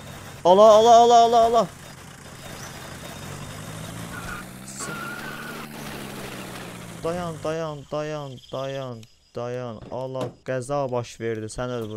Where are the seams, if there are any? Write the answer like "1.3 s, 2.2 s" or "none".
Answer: none